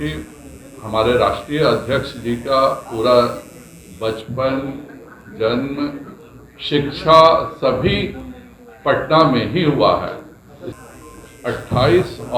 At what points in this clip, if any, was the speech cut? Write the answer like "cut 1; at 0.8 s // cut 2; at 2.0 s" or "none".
cut 1; at 10.7 s